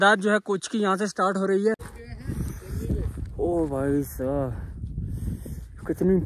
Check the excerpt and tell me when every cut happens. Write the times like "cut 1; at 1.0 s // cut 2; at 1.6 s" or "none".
cut 1; at 1.8 s